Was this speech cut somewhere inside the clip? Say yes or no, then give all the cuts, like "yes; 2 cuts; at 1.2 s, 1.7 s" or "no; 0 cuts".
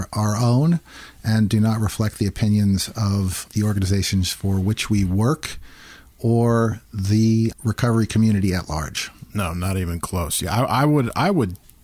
yes; 2 cuts; at 3.4 s, 7.6 s